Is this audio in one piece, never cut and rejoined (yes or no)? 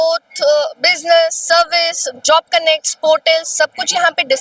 yes